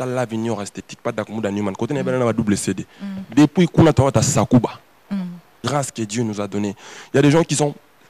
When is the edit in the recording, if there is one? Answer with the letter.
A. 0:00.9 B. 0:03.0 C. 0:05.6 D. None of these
C